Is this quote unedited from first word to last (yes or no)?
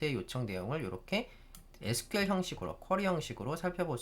yes